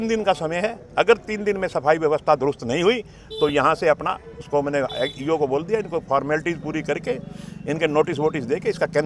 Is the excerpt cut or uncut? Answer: uncut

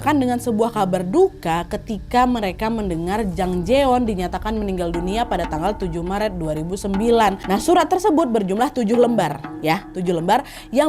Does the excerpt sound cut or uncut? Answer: cut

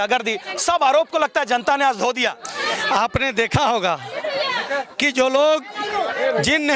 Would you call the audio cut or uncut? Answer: uncut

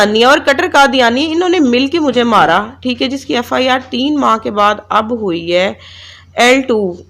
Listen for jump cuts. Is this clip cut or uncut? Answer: uncut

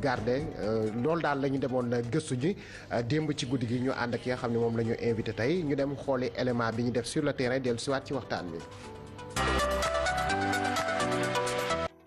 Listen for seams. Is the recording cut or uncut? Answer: cut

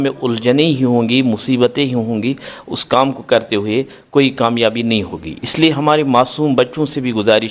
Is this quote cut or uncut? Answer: uncut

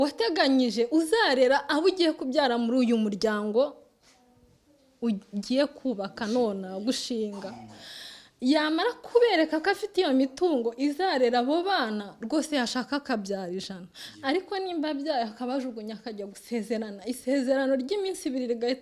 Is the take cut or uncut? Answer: uncut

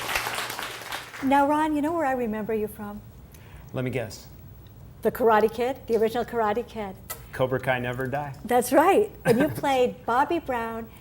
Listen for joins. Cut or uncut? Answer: cut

